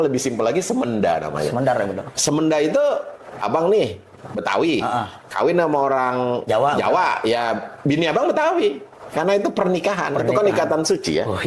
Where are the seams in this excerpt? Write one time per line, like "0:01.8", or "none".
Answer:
none